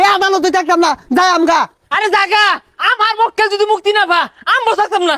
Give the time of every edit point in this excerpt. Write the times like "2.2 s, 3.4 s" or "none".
none